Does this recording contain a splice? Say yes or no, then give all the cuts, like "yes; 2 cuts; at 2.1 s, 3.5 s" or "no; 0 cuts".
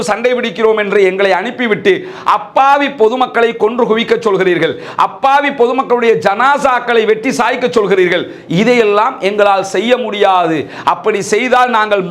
no; 0 cuts